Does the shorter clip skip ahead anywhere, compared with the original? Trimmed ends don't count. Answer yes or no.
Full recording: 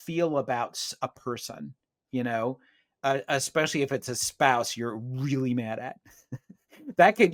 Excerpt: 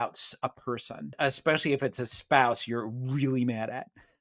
yes